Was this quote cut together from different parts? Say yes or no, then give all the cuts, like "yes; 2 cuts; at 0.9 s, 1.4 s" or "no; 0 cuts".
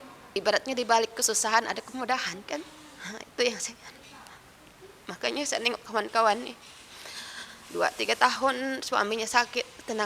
no; 0 cuts